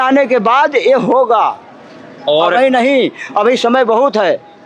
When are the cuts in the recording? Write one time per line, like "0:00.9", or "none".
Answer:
none